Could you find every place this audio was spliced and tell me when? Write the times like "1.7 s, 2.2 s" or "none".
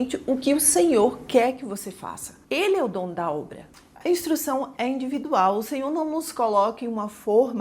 2.3 s, 3.6 s